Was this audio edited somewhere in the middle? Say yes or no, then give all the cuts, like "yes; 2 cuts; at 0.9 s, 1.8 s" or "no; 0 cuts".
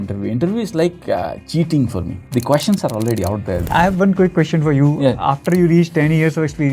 yes; 3 cuts; at 1.4 s, 2.2 s, 3.7 s